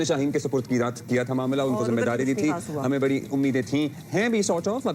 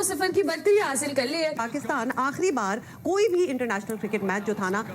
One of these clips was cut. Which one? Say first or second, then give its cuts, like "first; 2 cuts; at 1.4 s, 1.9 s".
second; 1 cut; at 1.7 s